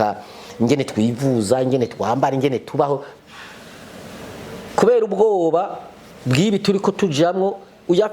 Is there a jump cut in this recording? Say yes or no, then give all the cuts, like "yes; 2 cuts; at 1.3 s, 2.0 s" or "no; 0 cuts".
yes; 1 cut; at 3.1 s